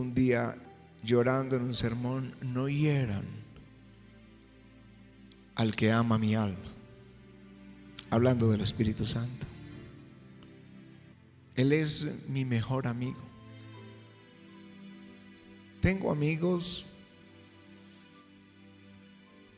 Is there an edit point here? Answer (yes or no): yes